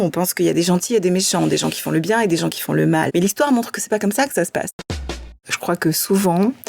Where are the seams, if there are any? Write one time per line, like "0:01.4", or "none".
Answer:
0:03.1
0:05.2